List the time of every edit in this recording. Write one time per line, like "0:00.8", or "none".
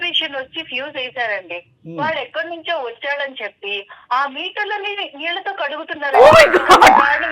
none